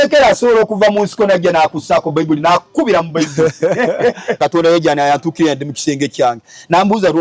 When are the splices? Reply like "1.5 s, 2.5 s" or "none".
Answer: 4.4 s